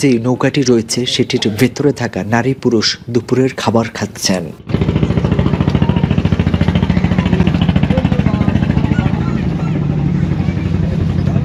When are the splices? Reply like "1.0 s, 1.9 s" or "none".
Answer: none